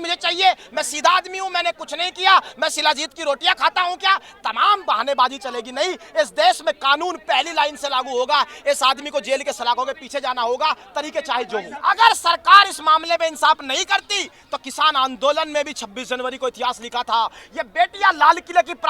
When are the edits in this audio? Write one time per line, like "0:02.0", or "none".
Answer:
0:11.7